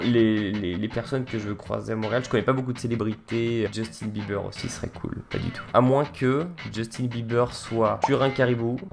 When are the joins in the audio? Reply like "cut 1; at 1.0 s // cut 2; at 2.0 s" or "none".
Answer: cut 1; at 3.7 s

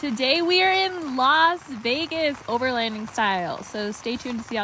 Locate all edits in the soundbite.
none

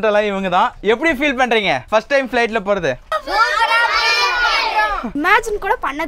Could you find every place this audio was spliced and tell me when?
cut 1; at 1.8 s // cut 2; at 3.1 s // cut 3; at 5.1 s

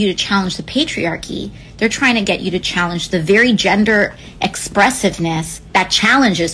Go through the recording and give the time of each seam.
cut 1; at 1.5 s // cut 2; at 5.6 s

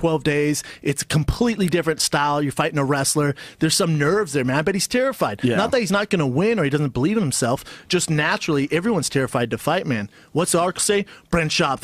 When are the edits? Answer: none

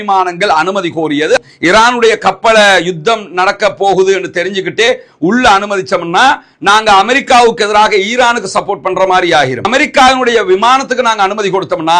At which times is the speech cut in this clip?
cut 1; at 1.4 s

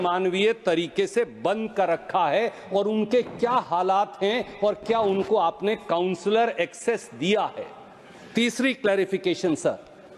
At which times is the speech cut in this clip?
none

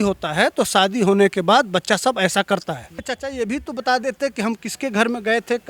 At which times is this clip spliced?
cut 1; at 2.9 s

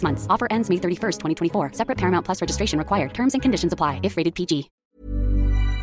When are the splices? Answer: cut 1; at 4.8 s

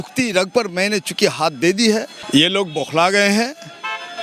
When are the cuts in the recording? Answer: cut 1; at 2.2 s

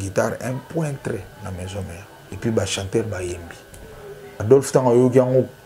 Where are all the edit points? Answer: cut 1; at 2.2 s // cut 2; at 4.3 s

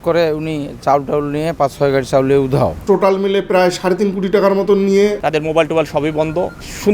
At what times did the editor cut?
cut 1; at 2.8 s // cut 2; at 5.2 s

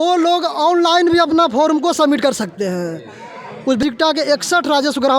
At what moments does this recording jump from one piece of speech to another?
cut 1; at 3.8 s

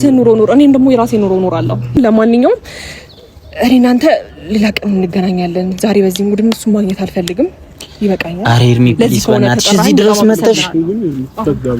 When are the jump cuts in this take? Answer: cut 1; at 2.0 s

